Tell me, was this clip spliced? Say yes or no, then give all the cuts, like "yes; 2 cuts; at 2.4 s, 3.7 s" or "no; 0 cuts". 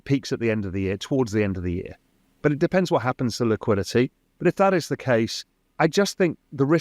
no; 0 cuts